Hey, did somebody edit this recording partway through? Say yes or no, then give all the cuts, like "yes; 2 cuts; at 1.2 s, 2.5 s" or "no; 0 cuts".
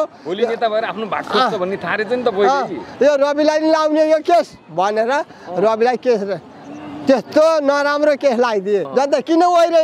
yes; 1 cut; at 8.9 s